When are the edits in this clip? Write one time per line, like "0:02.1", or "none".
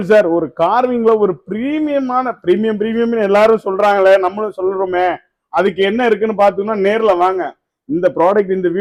none